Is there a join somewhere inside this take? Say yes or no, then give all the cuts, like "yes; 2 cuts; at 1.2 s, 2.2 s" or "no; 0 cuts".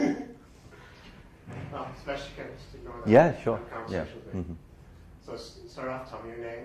yes; 1 cut; at 1.5 s